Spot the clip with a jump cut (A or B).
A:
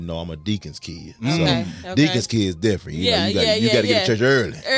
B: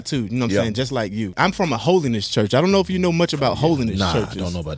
B